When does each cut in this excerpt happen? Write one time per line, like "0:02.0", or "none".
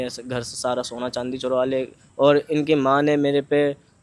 0:02.0